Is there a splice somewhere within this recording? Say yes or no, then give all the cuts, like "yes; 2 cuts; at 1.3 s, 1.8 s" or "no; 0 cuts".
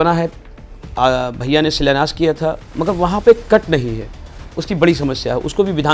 yes; 1 cut; at 2.7 s